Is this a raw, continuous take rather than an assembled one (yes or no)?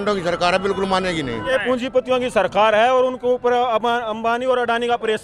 no